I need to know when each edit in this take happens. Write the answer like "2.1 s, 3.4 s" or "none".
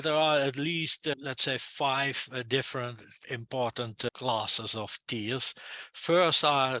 1.1 s, 3.2 s, 4.1 s